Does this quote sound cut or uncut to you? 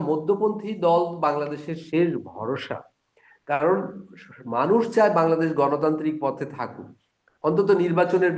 uncut